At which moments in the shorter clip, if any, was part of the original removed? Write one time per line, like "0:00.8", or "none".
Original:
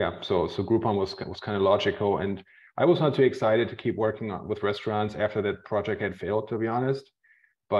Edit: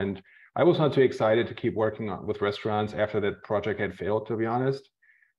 none